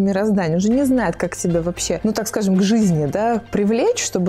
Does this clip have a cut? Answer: yes; 1 cut; at 2.0 s

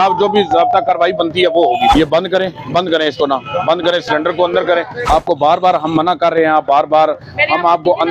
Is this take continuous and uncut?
no; 2 cuts; at 1.9 s, 5.0 s

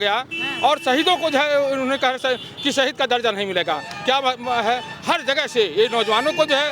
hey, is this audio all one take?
yes; 0 cuts

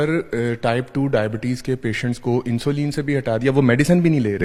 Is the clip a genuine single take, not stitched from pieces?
yes; 0 cuts

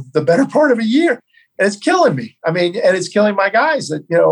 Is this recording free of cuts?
yes; 0 cuts

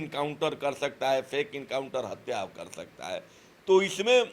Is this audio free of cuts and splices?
yes; 0 cuts

